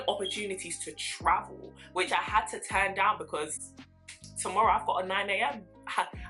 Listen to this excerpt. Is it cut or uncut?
uncut